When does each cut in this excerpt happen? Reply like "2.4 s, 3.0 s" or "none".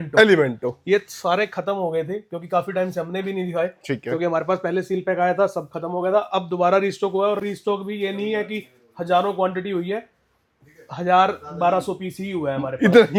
none